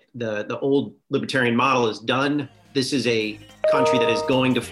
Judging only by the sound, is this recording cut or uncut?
cut